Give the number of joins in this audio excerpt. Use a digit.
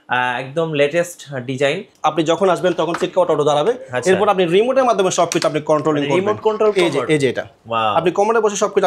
1